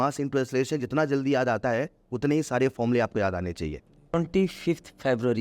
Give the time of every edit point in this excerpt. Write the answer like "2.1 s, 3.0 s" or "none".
4.1 s